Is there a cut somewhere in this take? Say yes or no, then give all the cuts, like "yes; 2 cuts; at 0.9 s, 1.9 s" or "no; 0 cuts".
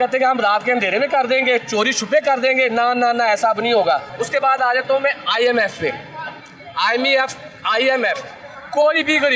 no; 0 cuts